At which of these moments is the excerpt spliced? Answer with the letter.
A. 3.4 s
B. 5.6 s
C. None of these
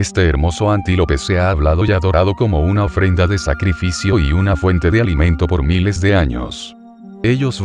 A